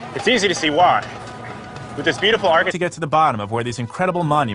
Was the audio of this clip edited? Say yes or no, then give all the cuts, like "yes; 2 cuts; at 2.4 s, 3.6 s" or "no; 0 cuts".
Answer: no; 0 cuts